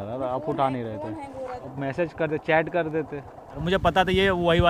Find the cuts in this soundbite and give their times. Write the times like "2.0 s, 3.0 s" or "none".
1.6 s, 3.6 s